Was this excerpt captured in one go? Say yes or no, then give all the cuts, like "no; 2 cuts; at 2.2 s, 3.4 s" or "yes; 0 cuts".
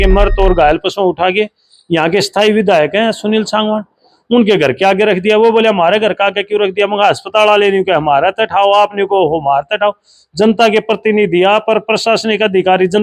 yes; 0 cuts